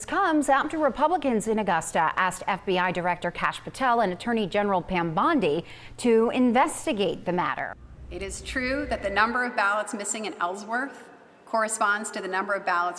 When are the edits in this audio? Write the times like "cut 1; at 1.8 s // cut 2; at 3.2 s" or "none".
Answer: cut 1; at 7.7 s